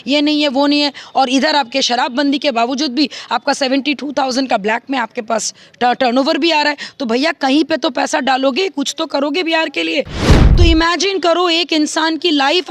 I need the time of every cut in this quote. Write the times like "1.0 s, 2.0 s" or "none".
10.3 s